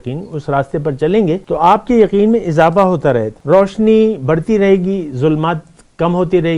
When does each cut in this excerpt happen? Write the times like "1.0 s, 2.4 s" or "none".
1.4 s, 3.3 s

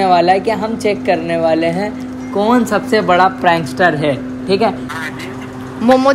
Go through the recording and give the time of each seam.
4.9 s

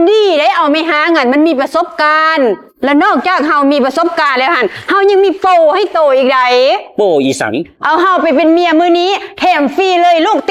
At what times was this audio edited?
none

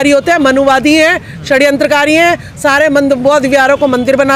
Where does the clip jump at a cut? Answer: none

